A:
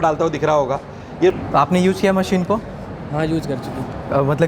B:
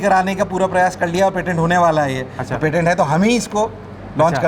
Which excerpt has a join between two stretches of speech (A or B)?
A